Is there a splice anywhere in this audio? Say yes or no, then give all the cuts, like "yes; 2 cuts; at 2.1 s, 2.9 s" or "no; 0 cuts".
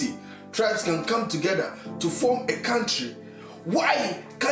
no; 0 cuts